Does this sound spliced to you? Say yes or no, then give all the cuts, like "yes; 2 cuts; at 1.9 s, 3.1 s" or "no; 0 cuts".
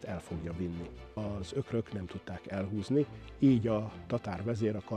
yes; 1 cut; at 1.2 s